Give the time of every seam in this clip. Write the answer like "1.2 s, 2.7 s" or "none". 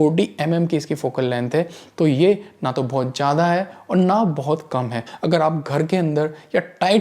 5.1 s